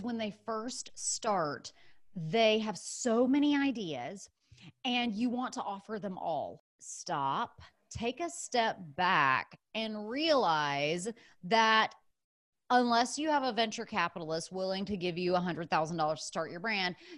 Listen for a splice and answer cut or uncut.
cut